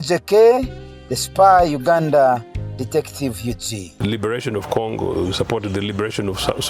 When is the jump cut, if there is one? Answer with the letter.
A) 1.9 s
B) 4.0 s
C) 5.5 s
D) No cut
B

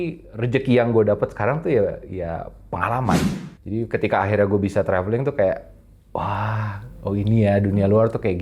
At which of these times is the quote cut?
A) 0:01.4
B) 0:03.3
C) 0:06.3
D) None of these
B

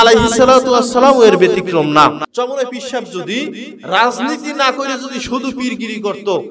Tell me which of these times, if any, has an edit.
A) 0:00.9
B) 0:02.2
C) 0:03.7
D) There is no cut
B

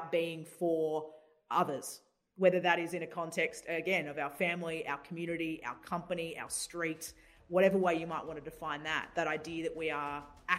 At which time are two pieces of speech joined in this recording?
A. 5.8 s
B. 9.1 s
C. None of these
B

